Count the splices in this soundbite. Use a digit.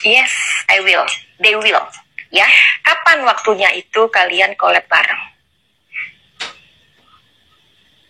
1